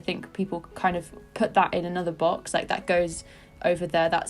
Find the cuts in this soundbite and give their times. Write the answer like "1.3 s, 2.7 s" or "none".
1.2 s